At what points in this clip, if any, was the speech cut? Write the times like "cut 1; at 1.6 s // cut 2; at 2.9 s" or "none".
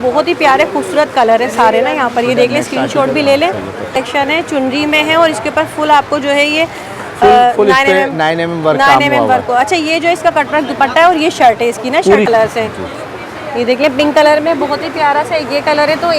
cut 1; at 3.9 s // cut 2; at 12.3 s